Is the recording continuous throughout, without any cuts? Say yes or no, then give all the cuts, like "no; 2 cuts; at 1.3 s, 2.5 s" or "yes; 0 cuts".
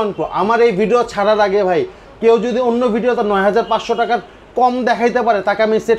yes; 0 cuts